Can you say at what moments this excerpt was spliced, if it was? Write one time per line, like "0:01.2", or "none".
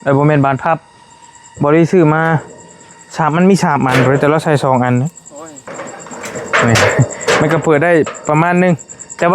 0:05.7